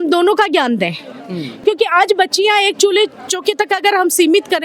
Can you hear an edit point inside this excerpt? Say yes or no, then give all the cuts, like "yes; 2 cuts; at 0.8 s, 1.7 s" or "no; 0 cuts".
yes; 1 cut; at 1.6 s